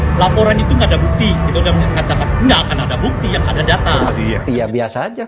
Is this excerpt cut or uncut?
cut